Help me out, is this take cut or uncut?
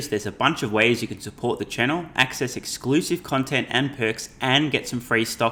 uncut